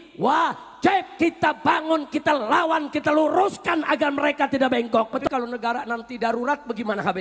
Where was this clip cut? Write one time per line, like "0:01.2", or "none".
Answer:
0:05.2

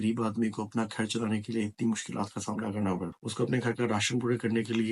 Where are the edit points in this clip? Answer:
0:03.2

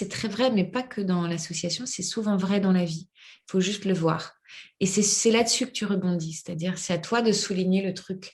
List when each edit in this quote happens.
none

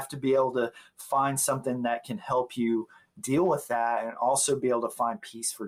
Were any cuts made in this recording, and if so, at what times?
none

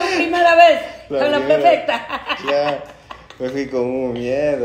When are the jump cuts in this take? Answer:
none

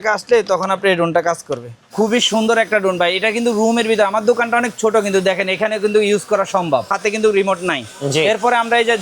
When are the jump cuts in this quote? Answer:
0:01.9
0:07.0

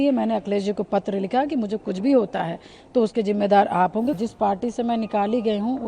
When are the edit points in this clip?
0:04.2

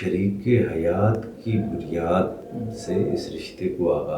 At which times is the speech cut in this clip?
0:02.5

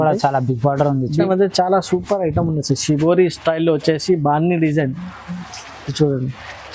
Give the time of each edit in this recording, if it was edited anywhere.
0:01.3

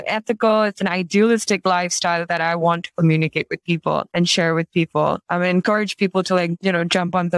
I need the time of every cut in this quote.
0:04.1
0:05.2
0:06.6

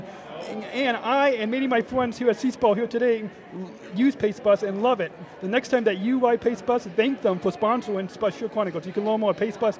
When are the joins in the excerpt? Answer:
none

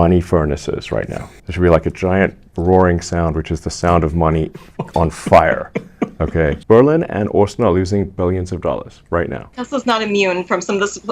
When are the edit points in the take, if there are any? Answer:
0:01.4
0:06.6
0:09.5

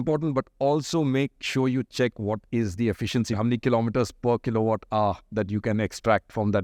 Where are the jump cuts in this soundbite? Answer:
0:03.4

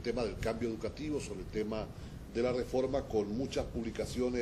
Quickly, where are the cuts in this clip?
0:01.6

